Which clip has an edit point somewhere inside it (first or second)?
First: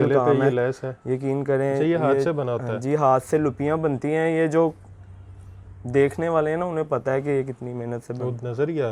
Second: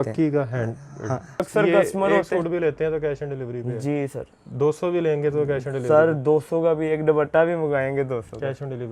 second